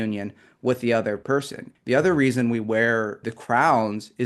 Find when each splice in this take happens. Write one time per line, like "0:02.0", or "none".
0:01.3
0:03.3